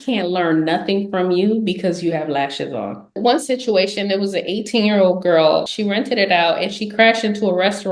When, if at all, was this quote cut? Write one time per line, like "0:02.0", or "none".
0:03.2
0:05.7

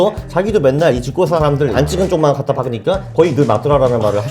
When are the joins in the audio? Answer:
0:01.7

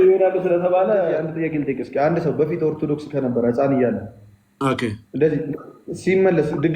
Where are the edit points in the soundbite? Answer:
0:01.3

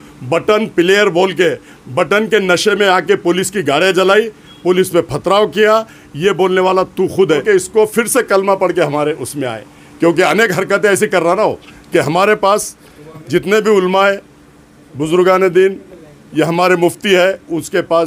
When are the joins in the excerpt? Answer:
0:07.4

